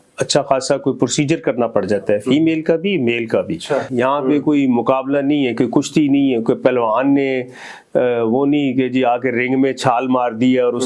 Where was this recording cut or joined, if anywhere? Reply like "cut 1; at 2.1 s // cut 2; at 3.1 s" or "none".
cut 1; at 3.9 s